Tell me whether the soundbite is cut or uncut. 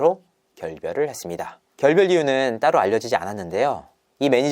uncut